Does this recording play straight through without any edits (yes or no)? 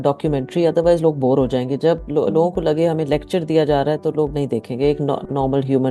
yes